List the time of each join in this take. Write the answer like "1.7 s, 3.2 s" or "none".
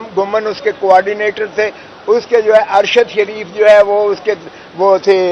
none